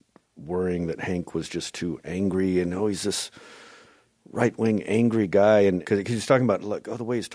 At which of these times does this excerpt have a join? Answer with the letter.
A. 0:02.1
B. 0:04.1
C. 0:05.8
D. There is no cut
C